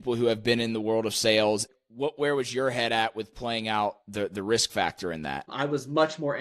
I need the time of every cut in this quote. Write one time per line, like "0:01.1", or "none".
0:01.7
0:05.5